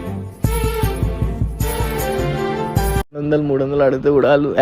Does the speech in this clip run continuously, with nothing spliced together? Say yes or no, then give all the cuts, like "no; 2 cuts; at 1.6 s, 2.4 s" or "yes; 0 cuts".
yes; 0 cuts